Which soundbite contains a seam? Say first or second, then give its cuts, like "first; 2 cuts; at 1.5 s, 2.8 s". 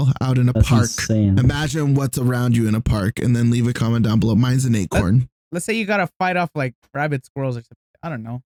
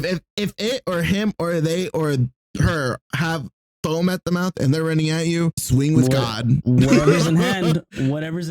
second; 1 cut; at 5.6 s